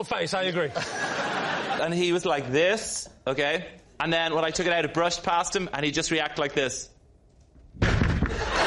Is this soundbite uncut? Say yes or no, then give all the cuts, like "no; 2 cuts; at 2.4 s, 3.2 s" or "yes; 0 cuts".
no; 1 cut; at 1.8 s